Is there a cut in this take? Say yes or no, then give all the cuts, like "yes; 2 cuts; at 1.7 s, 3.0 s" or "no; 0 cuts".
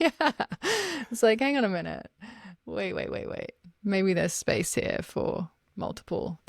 no; 0 cuts